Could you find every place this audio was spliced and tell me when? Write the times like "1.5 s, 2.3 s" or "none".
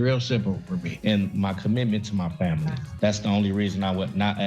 0.9 s